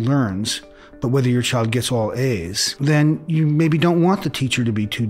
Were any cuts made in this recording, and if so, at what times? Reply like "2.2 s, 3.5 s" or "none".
2.8 s